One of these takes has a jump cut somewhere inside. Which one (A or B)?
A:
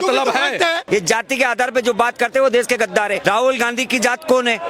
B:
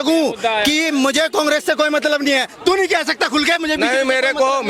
A